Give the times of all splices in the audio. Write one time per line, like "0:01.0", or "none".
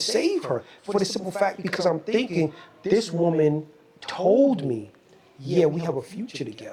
none

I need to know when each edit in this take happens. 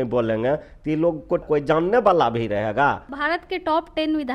0:01.4
0:03.1

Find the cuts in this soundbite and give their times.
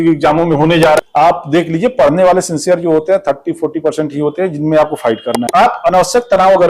0:01.0
0:05.5

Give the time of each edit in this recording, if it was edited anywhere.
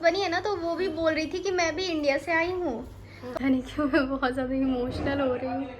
0:03.4

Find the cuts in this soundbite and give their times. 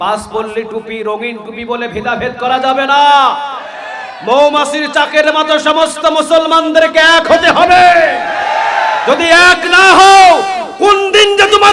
none

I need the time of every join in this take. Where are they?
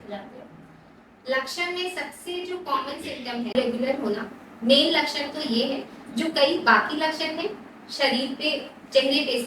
0:03.5

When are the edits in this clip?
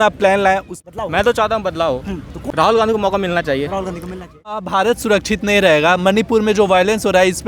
0:00.8
0:02.5
0:04.6

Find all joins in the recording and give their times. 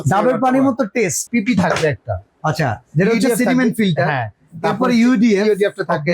0:01.3

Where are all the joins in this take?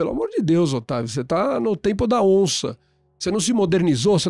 none

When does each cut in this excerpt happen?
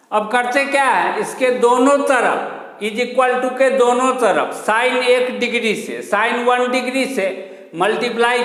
none

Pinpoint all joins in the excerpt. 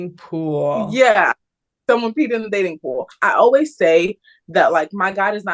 0:03.1

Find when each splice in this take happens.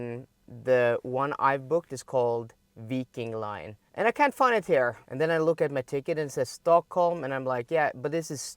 0:03.8
0:05.0

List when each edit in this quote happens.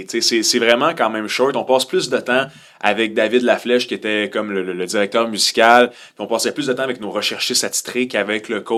none

